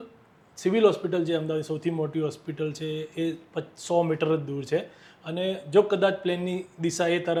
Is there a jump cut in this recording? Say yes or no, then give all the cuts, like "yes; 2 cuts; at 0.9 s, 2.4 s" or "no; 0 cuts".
no; 0 cuts